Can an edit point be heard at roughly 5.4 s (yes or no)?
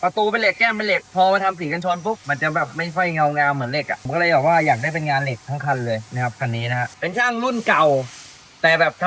no